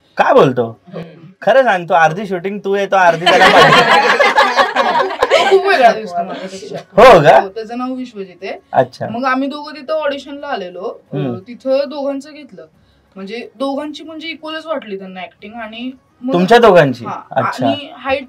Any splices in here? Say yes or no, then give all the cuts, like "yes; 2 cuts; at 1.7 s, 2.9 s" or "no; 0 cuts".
no; 0 cuts